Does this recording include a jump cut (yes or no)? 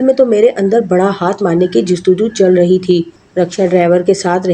yes